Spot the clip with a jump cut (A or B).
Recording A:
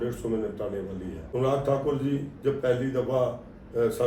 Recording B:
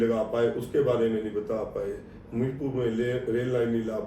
A